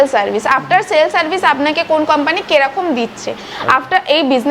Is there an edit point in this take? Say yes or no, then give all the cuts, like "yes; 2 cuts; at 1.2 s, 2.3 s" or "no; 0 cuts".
no; 0 cuts